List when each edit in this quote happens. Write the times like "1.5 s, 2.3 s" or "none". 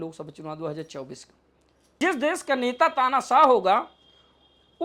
2.0 s